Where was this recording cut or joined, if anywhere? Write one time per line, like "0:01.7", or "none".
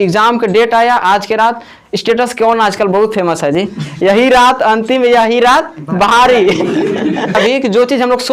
0:07.4